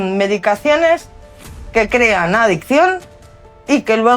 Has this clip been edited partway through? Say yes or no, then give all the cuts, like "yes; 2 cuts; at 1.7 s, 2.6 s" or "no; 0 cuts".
no; 0 cuts